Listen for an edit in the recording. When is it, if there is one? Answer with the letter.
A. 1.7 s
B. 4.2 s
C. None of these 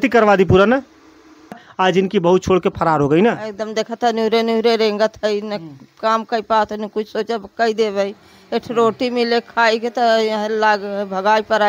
A